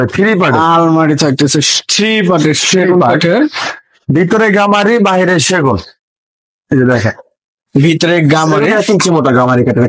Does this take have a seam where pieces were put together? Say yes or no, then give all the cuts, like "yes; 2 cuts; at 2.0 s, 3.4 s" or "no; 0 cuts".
no; 0 cuts